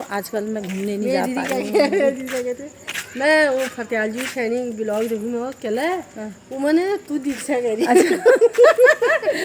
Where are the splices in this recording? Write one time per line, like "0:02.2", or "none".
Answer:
none